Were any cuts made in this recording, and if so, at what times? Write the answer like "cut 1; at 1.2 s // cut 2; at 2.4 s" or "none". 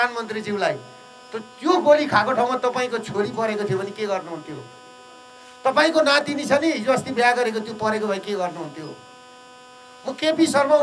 none